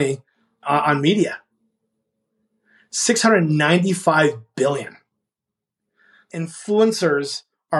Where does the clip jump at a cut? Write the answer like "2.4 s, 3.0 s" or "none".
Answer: 6.1 s